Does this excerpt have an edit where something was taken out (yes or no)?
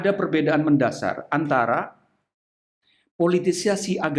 no